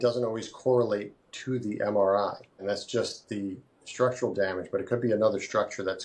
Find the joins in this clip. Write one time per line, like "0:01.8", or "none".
0:02.6